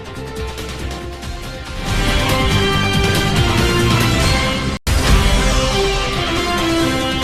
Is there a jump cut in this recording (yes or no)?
no